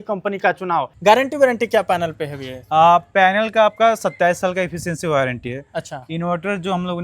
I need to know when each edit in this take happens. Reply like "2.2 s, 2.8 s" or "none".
0.9 s